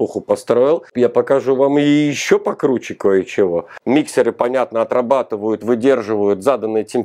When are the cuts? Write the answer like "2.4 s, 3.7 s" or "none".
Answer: 0.9 s, 3.7 s